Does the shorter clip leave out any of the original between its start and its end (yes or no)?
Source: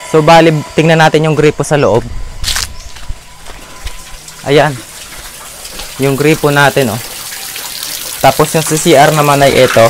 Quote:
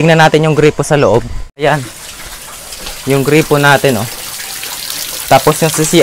yes